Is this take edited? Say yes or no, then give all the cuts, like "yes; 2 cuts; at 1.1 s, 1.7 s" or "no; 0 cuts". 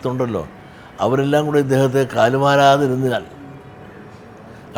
no; 0 cuts